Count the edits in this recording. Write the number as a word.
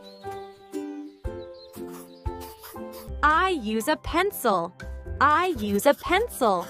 one